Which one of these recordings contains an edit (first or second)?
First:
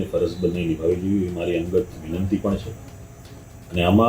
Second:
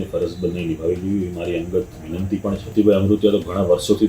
second